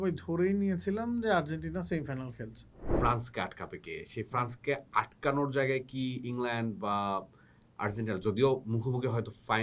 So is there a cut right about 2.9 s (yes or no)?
yes